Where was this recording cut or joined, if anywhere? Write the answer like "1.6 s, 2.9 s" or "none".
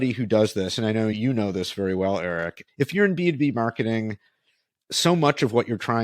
1.1 s, 2.6 s